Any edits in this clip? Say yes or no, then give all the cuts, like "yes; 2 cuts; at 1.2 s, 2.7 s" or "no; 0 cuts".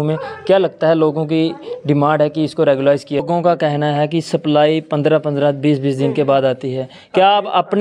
yes; 1 cut; at 3.2 s